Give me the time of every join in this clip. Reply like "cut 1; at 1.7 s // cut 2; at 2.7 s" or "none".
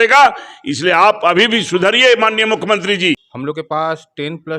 cut 1; at 3.3 s